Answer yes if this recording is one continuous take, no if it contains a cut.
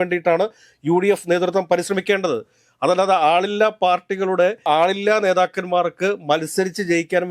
yes